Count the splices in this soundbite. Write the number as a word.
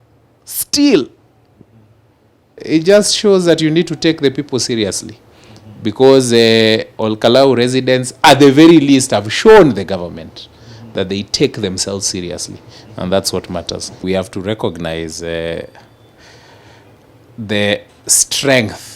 two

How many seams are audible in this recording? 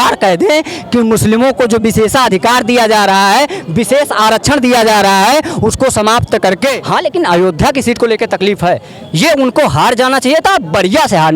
one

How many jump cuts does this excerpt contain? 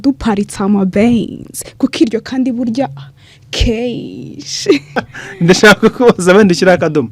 one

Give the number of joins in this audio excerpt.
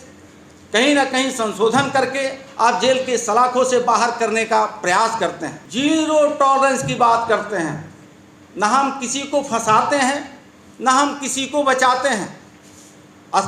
one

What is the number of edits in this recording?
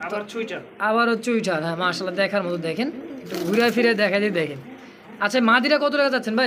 zero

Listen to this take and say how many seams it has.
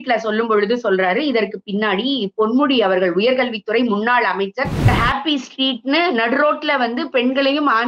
one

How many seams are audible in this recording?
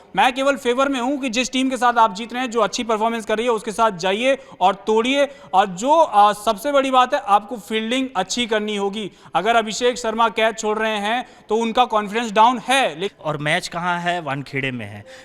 one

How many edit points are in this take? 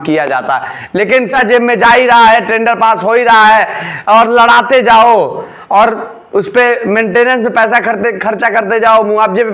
one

